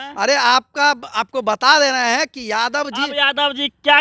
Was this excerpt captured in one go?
yes; 0 cuts

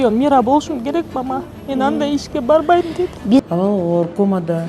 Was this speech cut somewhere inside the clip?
yes; 1 cut; at 3.4 s

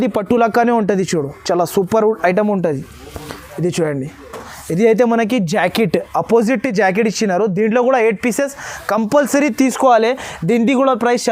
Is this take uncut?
yes; 0 cuts

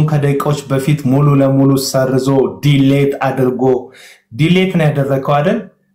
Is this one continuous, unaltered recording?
yes; 0 cuts

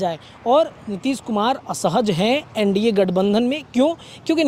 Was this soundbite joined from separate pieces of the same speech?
no; 0 cuts

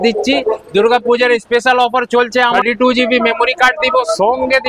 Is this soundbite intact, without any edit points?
no; 1 cut; at 2.6 s

